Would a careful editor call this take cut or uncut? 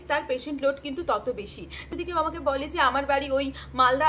cut